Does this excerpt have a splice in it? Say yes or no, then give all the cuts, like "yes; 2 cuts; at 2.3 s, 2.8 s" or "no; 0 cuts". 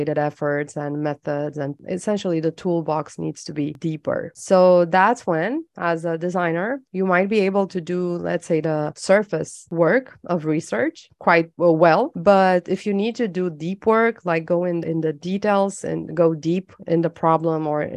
no; 0 cuts